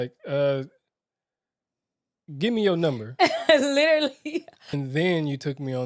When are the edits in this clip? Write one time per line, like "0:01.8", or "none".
0:04.6